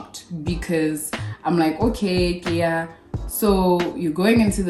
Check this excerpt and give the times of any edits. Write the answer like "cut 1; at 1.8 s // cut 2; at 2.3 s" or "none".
none